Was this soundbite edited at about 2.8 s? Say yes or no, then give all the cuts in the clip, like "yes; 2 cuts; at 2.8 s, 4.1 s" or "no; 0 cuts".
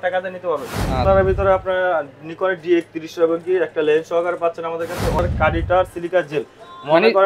no; 2 cuts; at 1.0 s, 5.2 s